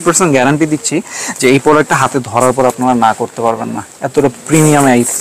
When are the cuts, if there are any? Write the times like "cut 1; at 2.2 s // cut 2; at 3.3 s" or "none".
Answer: none